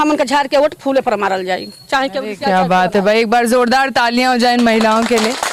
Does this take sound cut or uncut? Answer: uncut